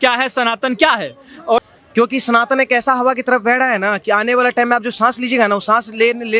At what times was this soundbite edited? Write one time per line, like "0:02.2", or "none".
0:01.7